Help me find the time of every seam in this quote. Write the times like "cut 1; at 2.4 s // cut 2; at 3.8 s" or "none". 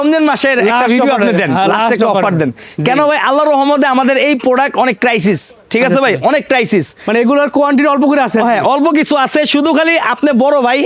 none